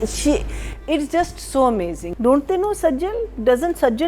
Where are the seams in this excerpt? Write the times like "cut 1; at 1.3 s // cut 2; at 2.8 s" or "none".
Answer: cut 1; at 2.0 s